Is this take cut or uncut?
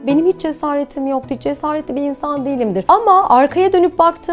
cut